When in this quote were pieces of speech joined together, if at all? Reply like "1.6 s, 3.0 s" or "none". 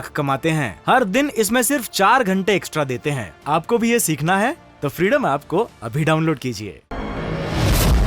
7.1 s